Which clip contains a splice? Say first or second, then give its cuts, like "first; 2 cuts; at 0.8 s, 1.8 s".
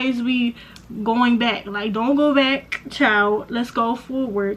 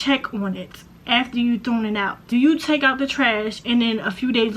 second; 1 cut; at 2.2 s